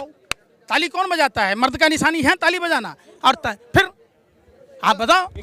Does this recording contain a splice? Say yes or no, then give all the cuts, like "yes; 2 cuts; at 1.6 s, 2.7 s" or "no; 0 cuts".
no; 0 cuts